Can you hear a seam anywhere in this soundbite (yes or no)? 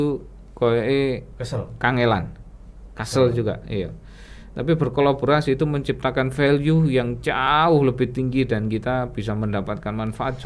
no